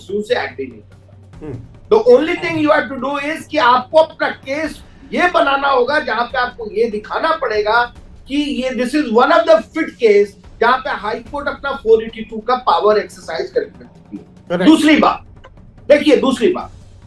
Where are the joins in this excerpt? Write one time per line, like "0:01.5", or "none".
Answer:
none